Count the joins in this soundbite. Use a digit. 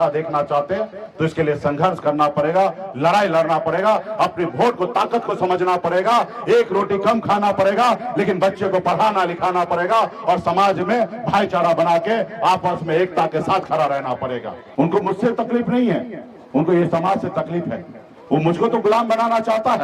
1